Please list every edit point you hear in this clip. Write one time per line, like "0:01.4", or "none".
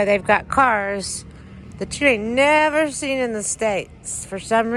none